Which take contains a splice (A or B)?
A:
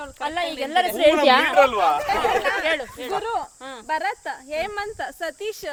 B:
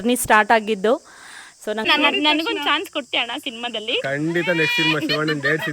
B